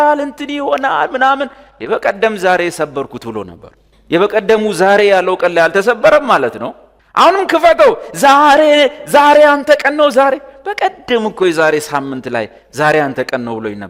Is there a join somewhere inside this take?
no; 0 cuts

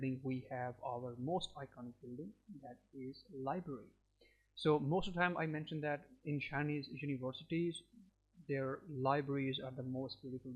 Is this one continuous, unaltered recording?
yes; 0 cuts

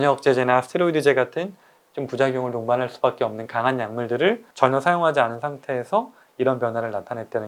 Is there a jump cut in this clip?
no; 0 cuts

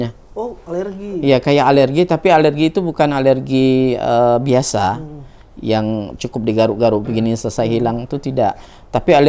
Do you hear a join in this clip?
no; 0 cuts

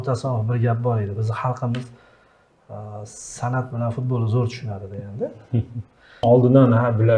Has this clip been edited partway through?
yes; 1 cut; at 6.2 s

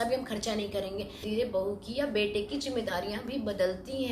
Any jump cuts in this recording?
yes; 1 cut; at 1.3 s

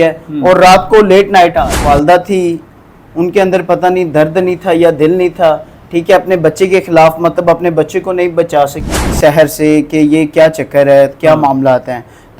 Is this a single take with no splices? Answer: no; 2 cuts; at 1.8 s, 9.0 s

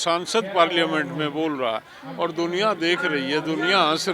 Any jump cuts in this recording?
no; 0 cuts

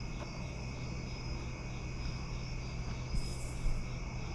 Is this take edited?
no; 0 cuts

